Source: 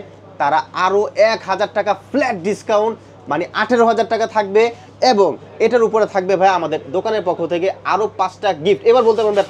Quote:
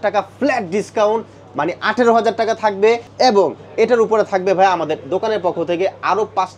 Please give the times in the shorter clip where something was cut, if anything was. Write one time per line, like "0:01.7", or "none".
0:03.1

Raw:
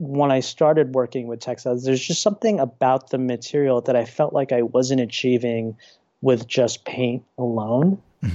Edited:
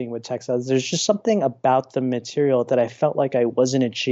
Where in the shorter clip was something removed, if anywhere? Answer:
none

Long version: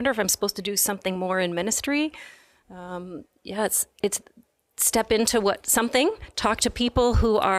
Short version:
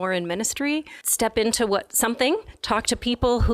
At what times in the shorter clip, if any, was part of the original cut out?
0:01.0

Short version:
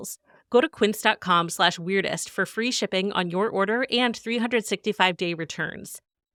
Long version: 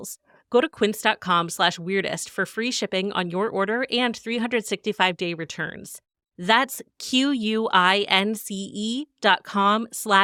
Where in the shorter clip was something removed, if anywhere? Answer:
none

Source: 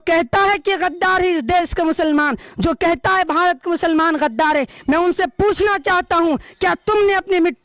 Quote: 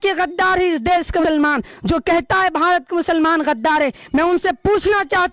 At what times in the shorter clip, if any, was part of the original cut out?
0:01.2

